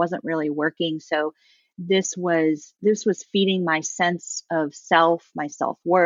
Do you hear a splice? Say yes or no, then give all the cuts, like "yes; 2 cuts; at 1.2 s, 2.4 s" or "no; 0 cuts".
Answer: no; 0 cuts